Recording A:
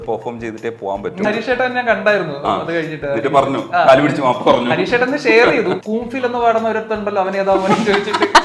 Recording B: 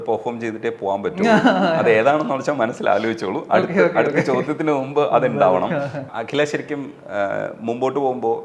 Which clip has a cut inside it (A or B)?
A